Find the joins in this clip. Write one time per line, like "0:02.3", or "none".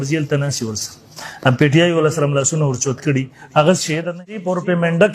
0:04.1